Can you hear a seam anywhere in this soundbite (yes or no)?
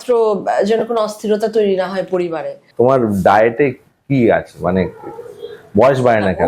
yes